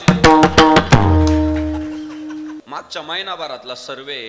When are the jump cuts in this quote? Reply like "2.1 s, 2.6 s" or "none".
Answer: 2.6 s